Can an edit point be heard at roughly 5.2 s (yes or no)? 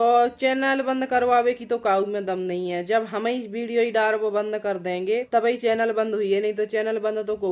yes